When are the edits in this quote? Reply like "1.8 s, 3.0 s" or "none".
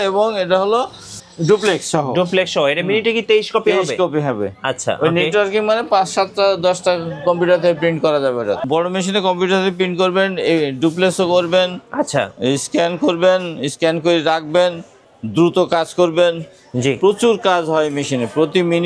8.6 s